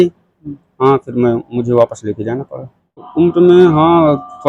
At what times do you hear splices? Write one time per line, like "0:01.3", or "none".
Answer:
0:03.1